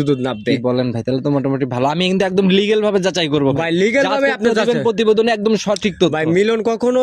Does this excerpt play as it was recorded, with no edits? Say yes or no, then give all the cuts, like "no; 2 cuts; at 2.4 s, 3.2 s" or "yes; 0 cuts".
yes; 0 cuts